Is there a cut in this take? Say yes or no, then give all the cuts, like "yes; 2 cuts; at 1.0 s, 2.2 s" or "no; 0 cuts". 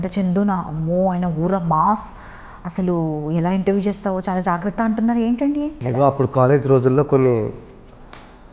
yes; 1 cut; at 5.8 s